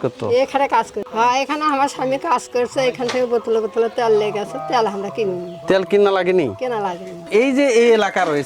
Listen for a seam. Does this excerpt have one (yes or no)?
yes